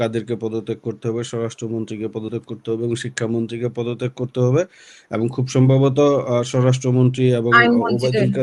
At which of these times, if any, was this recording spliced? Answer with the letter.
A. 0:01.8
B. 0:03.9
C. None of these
C